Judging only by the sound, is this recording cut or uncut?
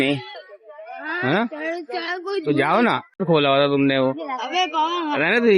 cut